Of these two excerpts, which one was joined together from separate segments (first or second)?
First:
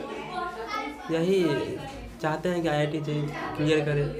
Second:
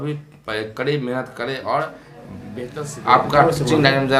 second